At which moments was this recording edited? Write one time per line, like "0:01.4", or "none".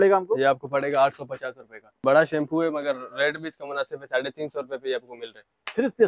0:02.0